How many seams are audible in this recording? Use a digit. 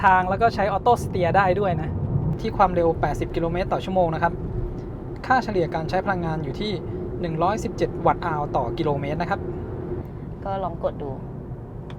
2